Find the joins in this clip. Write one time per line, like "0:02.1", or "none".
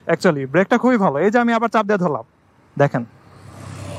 none